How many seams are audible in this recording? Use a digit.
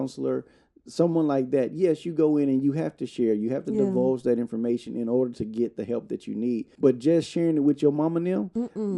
1